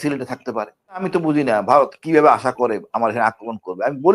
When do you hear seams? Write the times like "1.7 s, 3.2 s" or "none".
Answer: 1.1 s